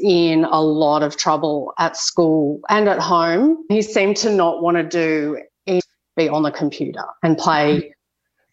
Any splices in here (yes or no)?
yes